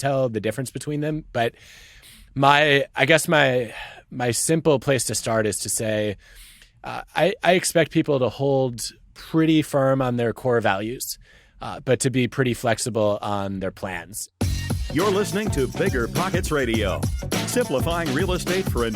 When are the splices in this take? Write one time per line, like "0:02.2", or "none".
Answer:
0:14.3